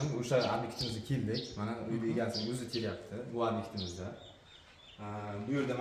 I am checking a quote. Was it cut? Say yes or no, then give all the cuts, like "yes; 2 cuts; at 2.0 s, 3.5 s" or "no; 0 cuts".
no; 0 cuts